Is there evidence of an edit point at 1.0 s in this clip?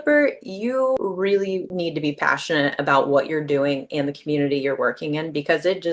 yes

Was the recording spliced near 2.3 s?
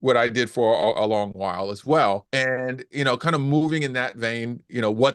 yes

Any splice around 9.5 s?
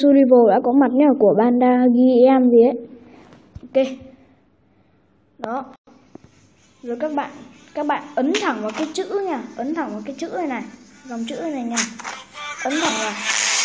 yes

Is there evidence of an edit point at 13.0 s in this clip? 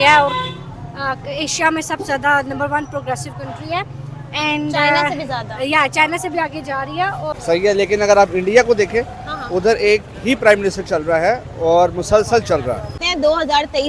yes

